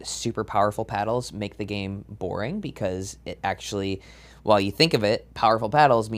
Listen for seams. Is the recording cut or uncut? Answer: uncut